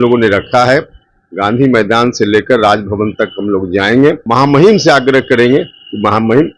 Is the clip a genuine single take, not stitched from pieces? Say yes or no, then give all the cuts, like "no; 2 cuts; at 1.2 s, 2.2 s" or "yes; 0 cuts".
no; 1 cut; at 4.2 s